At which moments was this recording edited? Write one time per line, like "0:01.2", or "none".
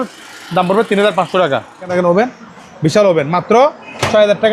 0:01.9